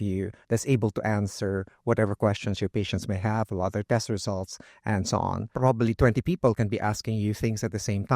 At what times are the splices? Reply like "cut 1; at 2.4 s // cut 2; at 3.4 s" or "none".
cut 1; at 5.5 s

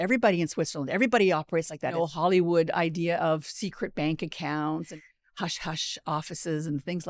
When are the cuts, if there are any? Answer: cut 1; at 1.9 s // cut 2; at 4.9 s

